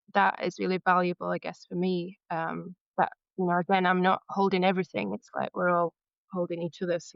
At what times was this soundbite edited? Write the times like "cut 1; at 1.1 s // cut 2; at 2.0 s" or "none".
none